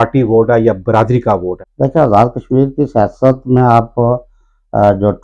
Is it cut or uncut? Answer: uncut